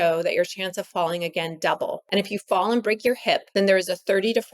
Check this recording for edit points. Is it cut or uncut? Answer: cut